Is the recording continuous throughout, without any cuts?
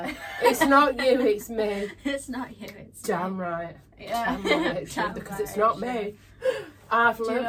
yes; 0 cuts

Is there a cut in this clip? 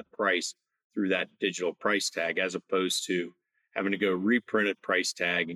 no; 0 cuts

